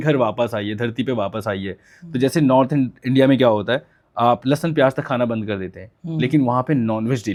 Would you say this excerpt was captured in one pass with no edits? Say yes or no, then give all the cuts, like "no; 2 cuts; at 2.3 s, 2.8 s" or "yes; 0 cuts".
yes; 0 cuts